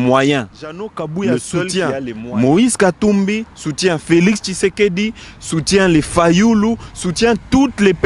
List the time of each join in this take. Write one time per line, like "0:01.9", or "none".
0:01.7